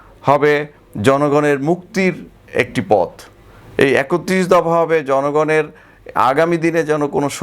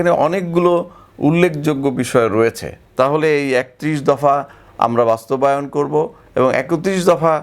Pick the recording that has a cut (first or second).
second